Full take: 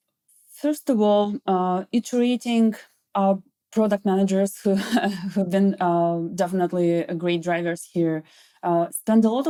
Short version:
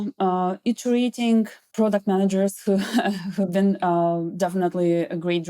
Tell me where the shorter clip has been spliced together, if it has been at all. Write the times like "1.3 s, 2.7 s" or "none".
1.6 s